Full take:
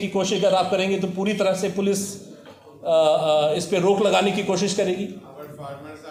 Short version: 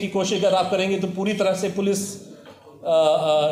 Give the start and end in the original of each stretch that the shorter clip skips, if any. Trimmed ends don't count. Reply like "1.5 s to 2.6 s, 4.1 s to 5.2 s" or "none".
none